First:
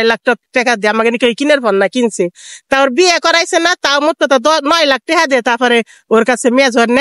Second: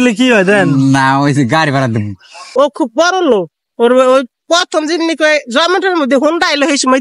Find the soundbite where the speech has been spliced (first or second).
second